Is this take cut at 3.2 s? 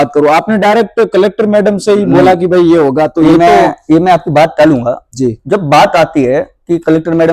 no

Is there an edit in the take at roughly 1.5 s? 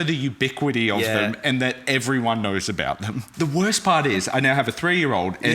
no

